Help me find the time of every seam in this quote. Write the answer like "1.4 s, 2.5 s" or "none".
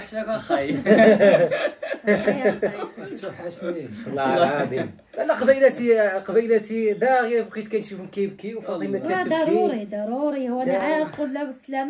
none